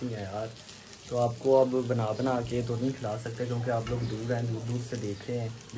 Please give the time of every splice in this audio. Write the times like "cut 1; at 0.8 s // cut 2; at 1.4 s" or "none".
none